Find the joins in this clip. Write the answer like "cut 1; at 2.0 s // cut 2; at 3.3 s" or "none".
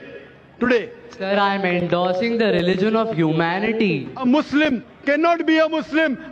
cut 1; at 1.1 s // cut 2; at 4.2 s